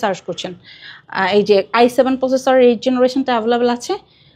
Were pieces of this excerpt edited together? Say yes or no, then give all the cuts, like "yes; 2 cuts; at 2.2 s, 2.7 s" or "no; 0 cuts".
no; 0 cuts